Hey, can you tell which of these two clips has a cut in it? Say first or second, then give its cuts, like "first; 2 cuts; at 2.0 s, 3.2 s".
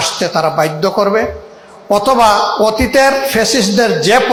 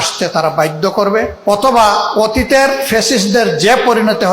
second; 1 cut; at 1.3 s